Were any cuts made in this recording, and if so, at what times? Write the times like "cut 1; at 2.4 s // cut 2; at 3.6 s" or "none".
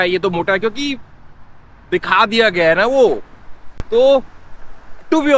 none